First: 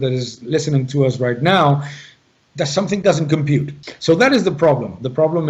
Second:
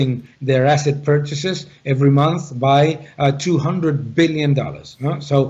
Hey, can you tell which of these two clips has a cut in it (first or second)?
first